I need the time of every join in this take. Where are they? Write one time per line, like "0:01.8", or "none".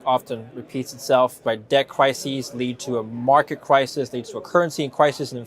0:01.4